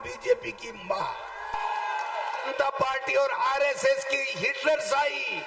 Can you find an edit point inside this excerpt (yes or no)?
yes